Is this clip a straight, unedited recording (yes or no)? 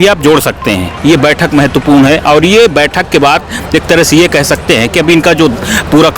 no